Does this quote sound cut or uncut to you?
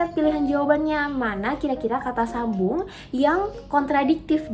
uncut